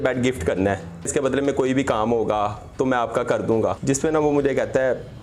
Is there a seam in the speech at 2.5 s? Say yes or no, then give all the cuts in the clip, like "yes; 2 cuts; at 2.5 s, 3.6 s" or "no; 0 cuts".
no; 2 cuts; at 1.1 s, 3.8 s